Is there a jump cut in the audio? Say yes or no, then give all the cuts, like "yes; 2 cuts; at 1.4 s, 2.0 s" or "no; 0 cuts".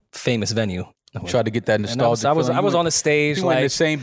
yes; 1 cut; at 0.9 s